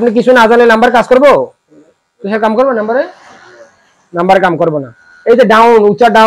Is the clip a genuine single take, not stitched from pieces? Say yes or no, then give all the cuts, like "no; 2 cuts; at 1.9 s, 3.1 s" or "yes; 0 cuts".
yes; 0 cuts